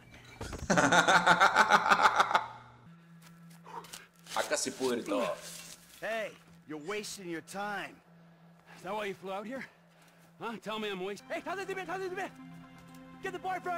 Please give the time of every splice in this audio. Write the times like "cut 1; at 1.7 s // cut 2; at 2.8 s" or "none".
cut 1; at 2.9 s // cut 2; at 11.2 s